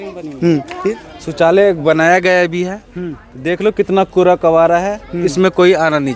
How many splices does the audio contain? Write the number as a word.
one